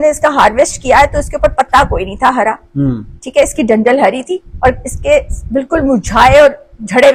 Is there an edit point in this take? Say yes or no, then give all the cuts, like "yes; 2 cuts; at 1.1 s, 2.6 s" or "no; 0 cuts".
no; 0 cuts